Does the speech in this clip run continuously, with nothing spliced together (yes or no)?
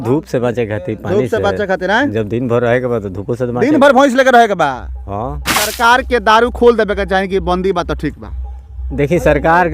no